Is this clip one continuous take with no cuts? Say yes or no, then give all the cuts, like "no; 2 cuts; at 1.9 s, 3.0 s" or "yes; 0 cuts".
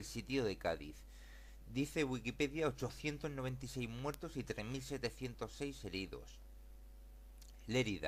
no; 1 cut; at 0.9 s